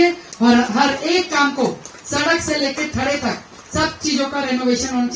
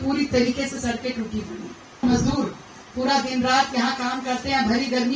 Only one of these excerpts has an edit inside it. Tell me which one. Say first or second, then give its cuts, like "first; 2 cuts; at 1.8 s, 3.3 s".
second; 1 cut; at 2.0 s